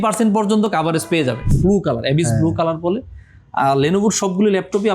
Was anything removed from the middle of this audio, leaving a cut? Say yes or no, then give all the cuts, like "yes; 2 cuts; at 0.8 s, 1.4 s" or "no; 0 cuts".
yes; 1 cut; at 1.5 s